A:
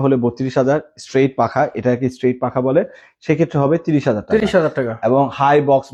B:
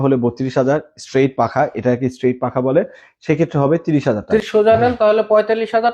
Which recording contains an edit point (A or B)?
B